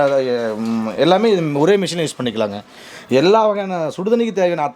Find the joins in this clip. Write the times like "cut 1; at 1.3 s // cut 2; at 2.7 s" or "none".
cut 1; at 2.8 s